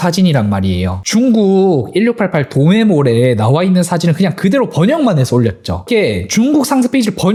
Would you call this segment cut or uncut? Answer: uncut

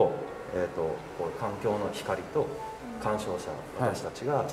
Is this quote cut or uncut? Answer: uncut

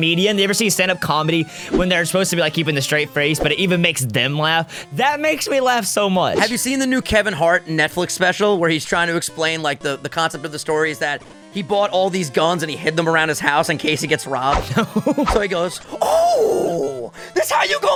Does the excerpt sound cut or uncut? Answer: uncut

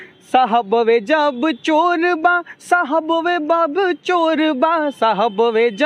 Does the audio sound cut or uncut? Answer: uncut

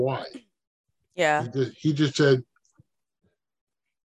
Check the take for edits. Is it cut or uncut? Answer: uncut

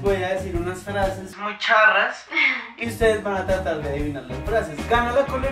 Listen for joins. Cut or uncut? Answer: uncut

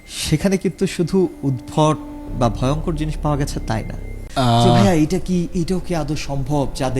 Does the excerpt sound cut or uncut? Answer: cut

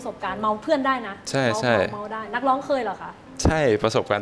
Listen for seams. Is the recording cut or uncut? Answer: uncut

